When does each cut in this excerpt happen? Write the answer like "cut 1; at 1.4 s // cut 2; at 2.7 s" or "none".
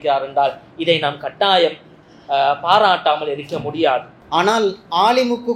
cut 1; at 4.2 s